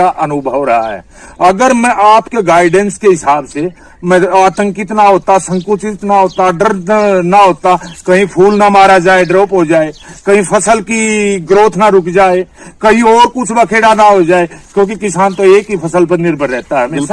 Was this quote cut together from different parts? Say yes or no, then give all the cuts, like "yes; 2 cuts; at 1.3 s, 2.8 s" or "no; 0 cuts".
no; 0 cuts